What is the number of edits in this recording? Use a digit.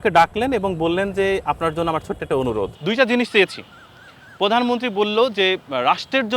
1